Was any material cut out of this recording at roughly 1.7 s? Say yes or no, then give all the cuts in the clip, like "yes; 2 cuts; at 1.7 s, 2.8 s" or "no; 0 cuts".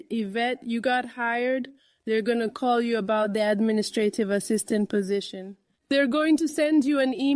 no; 0 cuts